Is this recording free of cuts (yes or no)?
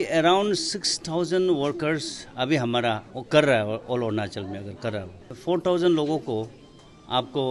no